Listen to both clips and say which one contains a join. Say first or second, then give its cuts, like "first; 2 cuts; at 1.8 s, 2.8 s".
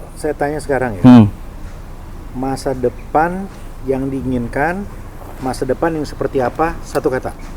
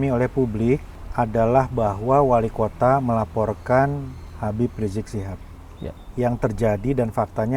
second; 2 cuts; at 1.0 s, 6.0 s